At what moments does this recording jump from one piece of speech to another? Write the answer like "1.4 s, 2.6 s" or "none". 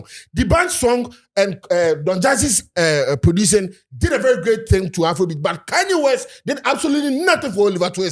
none

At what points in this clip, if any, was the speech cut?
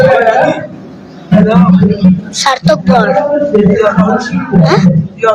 1.3 s

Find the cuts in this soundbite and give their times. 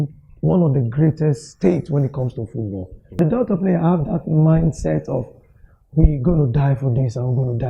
3.2 s

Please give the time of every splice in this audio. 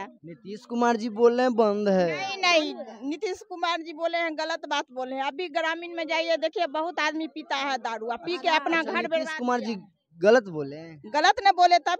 none

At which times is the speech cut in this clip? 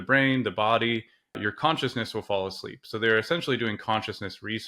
1.4 s

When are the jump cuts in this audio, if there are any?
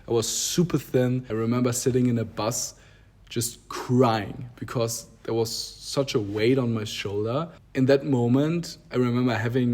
1.3 s, 7.6 s

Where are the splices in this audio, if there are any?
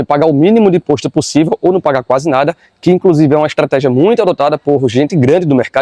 none

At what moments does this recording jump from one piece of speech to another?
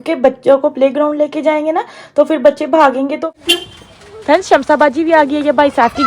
3.3 s

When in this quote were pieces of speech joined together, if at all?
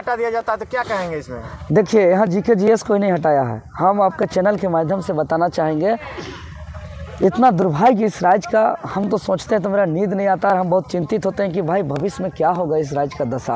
none

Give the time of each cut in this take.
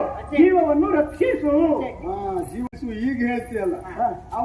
2.7 s

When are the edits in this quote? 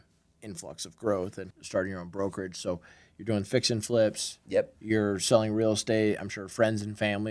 1.5 s

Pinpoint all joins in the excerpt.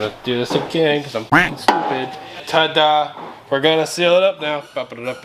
none

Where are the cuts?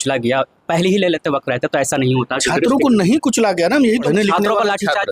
4.0 s

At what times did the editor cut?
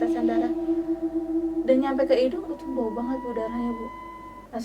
1.6 s

